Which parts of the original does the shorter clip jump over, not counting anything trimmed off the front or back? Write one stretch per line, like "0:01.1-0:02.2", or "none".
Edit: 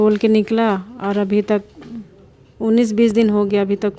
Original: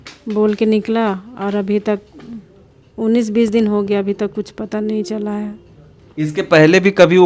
none

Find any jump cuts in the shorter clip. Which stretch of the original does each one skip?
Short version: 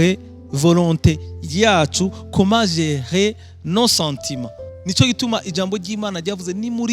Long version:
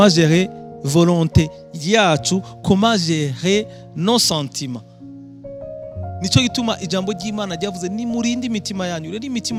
0:05.0-0:06.0

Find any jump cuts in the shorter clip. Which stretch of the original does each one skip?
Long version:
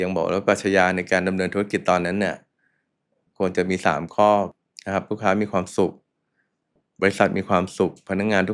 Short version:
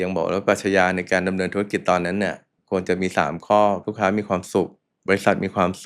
0:02.5-0:03.2
0:04.6-0:05.1
0:06.1-0:06.8

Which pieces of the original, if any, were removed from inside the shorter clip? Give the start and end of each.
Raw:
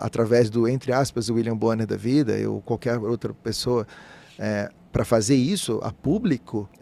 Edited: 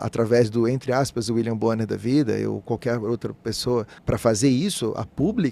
0:04.0-0:04.8

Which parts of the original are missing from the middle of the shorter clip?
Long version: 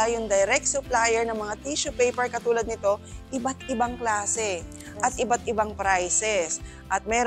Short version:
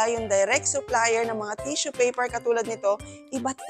none

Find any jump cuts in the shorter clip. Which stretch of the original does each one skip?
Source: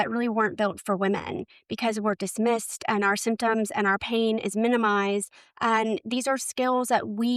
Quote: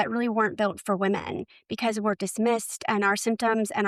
none

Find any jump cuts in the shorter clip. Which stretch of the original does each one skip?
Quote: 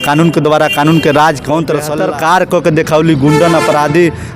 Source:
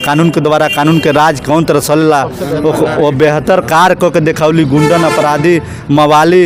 0:01.9-0:03.4

